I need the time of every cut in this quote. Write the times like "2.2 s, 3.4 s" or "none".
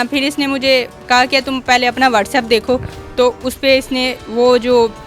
2.9 s